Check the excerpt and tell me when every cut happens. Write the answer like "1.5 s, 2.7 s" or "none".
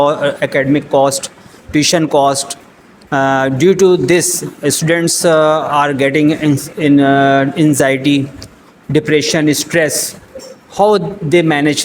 none